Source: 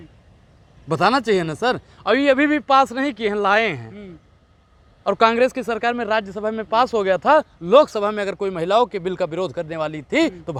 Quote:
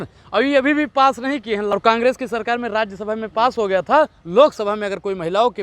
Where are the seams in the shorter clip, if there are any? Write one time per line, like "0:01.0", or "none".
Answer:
0:01.7